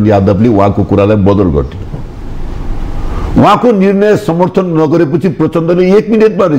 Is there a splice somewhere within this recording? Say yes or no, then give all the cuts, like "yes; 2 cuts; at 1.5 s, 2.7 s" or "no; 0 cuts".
no; 0 cuts